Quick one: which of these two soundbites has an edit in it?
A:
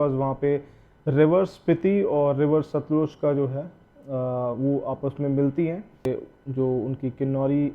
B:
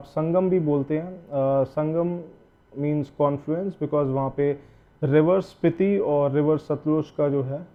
A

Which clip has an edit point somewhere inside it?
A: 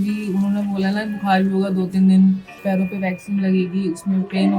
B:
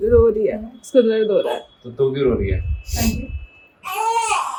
A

